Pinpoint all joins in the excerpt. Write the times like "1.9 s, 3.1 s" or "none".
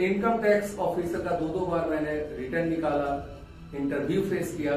none